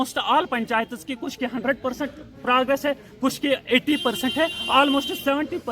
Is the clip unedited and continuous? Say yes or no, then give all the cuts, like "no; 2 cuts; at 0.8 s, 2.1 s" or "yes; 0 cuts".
yes; 0 cuts